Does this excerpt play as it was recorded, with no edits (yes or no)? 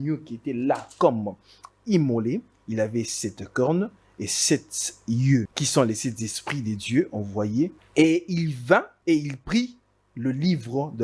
no